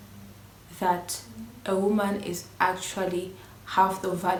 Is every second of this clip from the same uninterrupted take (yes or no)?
yes